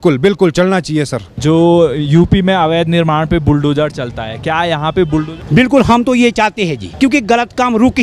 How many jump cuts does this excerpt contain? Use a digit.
3